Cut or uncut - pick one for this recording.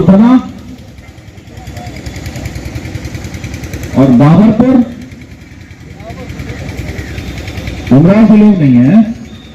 uncut